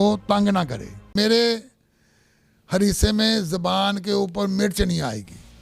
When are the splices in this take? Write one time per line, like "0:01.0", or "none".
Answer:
0:01.1